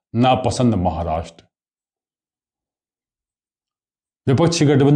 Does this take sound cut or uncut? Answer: uncut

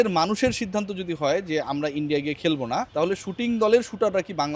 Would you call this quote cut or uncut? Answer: cut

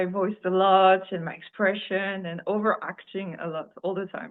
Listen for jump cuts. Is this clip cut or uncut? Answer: uncut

